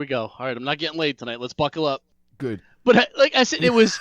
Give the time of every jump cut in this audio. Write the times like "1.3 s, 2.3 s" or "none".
2.1 s